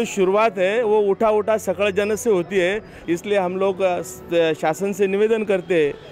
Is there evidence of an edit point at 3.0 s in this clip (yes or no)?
yes